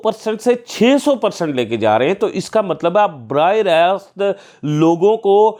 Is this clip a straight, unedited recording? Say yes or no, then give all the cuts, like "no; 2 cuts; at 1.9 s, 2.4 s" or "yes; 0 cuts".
yes; 0 cuts